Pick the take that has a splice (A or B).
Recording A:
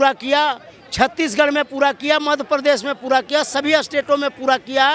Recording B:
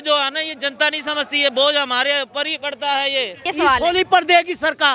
B